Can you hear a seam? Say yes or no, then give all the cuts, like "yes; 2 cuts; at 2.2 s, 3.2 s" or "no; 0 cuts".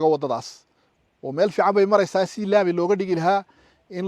no; 0 cuts